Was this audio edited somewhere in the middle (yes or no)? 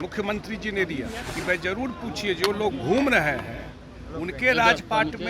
yes